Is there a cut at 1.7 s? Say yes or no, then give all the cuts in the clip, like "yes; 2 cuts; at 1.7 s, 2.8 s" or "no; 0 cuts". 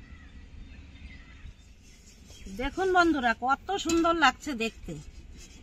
yes; 1 cut; at 1.7 s